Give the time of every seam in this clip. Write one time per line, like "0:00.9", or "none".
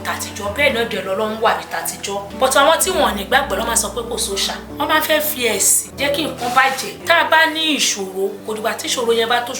0:02.3
0:04.6
0:05.8
0:06.9
0:08.4